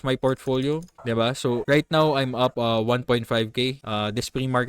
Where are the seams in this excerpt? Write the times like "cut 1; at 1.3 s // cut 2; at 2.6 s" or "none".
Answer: cut 1; at 1.4 s // cut 2; at 2.6 s // cut 3; at 3.8 s